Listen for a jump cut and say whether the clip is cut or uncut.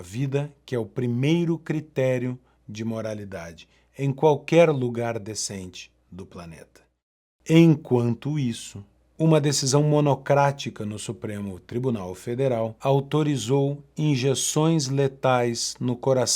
cut